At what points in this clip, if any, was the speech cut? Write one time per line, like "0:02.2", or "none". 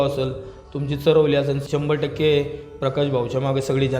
0:01.6